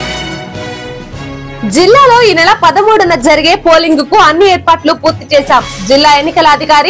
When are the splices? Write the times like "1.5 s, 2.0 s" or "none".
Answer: 1.6 s

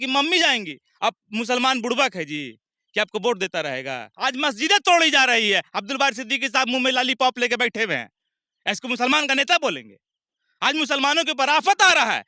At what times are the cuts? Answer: 4.1 s

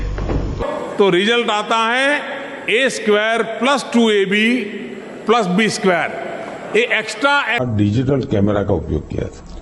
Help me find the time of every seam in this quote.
7.6 s

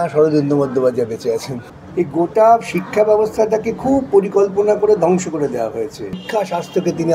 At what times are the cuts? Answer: 1.6 s, 6.2 s

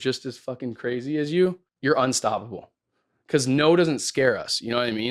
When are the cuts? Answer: 1.7 s

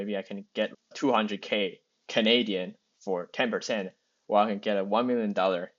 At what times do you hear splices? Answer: 0.9 s

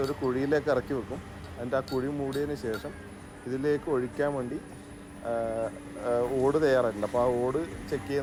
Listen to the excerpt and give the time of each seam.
none

